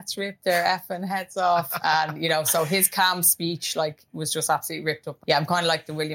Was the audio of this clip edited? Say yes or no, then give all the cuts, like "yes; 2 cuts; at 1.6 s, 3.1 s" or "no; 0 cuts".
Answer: yes; 1 cut; at 5.1 s